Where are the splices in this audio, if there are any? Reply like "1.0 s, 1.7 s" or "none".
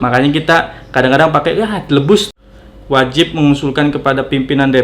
2.3 s